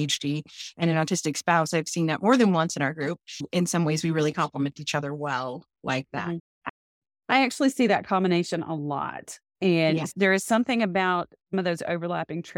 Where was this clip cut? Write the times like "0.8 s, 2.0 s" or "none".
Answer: none